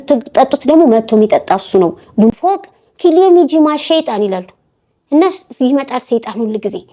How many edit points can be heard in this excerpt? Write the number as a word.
one